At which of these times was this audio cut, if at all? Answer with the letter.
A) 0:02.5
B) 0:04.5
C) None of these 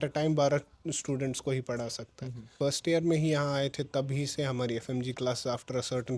A